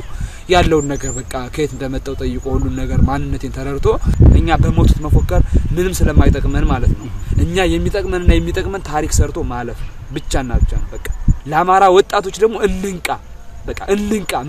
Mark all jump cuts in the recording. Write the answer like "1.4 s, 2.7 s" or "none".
4.1 s